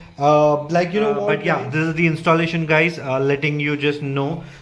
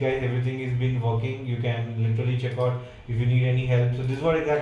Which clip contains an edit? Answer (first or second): first